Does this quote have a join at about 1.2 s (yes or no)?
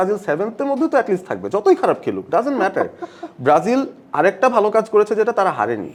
no